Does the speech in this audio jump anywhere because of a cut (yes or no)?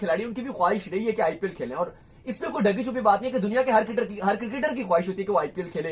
no